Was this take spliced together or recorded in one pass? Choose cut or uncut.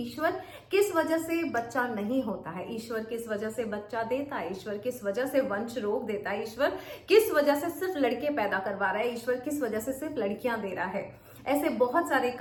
uncut